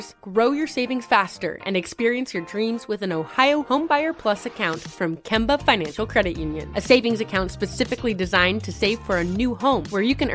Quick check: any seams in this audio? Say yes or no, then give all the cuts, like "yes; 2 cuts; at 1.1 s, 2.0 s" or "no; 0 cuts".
no; 0 cuts